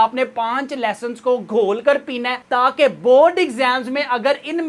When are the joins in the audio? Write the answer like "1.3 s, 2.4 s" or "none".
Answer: none